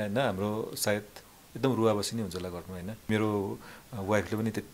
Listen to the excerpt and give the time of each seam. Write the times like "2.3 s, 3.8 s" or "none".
3.1 s